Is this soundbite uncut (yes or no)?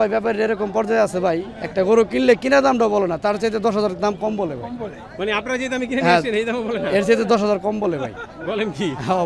yes